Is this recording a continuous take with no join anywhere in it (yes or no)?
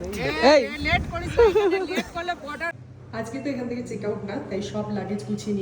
no